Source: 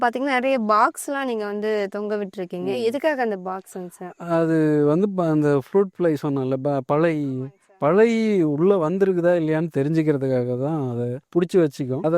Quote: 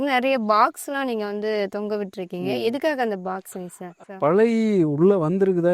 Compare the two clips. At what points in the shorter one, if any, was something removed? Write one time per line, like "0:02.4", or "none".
0:03.9